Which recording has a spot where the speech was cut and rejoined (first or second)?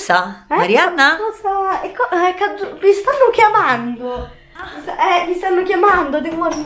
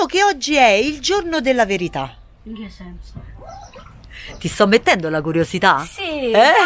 first